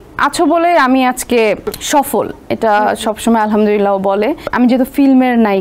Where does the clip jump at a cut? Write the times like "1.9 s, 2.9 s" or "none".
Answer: 1.7 s, 4.4 s